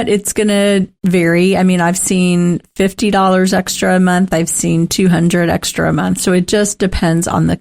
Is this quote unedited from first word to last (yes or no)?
no